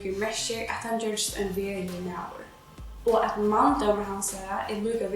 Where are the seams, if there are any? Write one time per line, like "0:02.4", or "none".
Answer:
none